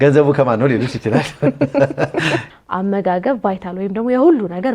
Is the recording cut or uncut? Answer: cut